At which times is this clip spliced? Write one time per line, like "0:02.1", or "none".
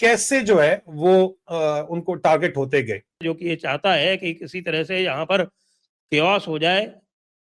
0:03.2